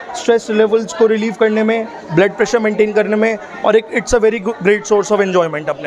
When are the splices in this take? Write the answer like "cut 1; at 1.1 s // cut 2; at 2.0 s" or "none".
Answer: none